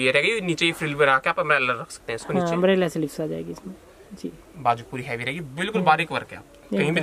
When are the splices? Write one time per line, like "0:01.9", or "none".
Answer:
none